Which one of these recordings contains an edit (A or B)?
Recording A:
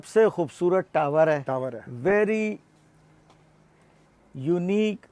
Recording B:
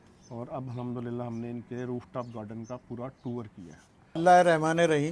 B